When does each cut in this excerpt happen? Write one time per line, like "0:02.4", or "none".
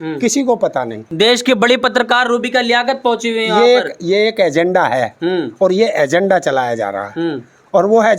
0:01.1